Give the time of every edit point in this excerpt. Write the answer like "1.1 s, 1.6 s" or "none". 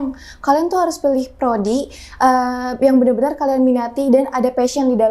none